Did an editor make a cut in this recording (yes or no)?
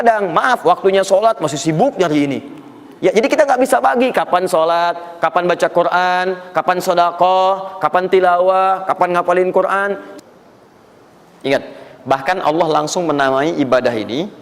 yes